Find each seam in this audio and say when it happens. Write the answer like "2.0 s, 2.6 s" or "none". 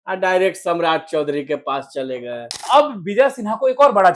2.6 s

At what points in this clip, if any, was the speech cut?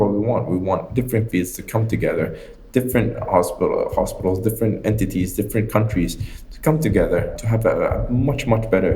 7.3 s

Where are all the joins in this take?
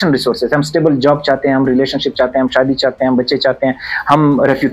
none

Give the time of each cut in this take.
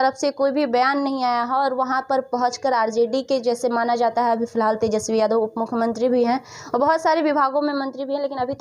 none

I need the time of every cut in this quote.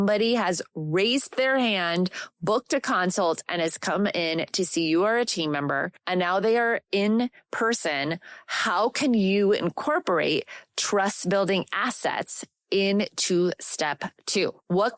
none

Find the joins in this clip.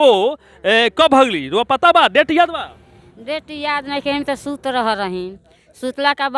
none

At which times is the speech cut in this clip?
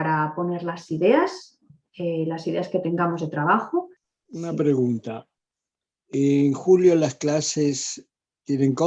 4.0 s

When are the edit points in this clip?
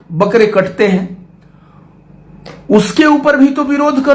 none

